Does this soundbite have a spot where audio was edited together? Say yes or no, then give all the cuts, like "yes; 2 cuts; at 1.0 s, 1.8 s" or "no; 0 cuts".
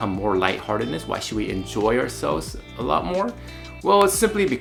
no; 0 cuts